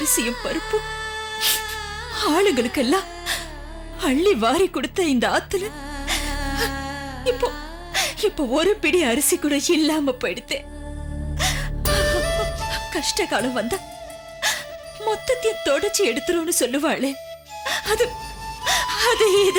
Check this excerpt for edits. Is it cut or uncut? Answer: uncut